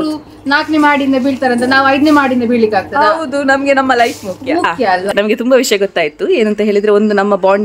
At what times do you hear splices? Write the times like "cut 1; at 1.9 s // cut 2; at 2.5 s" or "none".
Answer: cut 1; at 5.0 s